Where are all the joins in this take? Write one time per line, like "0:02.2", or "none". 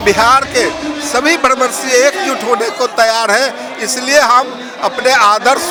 none

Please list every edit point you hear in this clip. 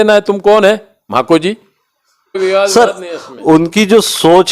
0:02.4

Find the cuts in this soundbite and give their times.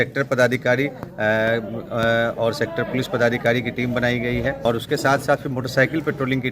0:04.6

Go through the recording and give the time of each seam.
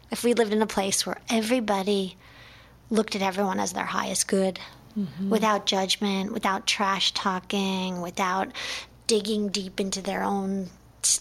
none

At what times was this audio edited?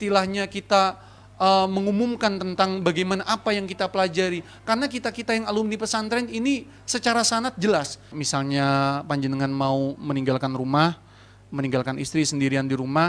0:08.2

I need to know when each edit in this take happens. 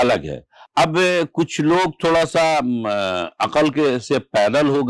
none

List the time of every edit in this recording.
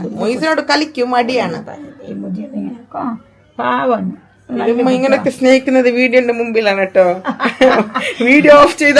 none

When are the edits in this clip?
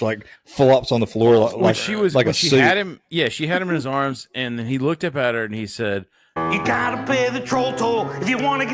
none

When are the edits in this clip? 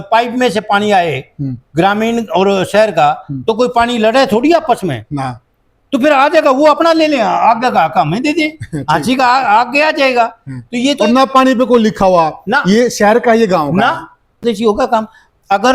0:14.4

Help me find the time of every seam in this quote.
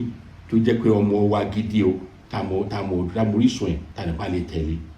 0:03.9

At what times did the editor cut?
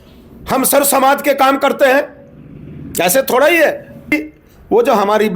0:04.1

